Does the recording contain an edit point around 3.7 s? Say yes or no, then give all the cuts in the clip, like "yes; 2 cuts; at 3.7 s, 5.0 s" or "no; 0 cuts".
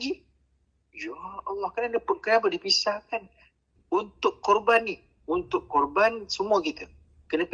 yes; 1 cut; at 3.7 s